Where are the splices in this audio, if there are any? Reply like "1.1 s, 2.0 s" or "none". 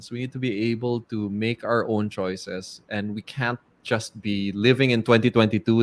none